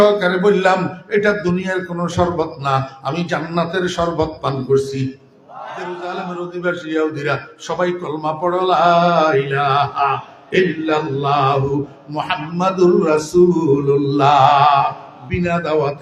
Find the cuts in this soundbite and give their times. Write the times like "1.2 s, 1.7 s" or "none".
5.8 s